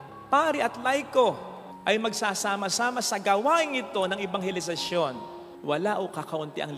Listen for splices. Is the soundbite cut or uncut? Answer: uncut